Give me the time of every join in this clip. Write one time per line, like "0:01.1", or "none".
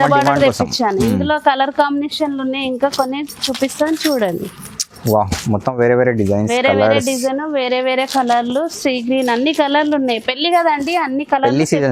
none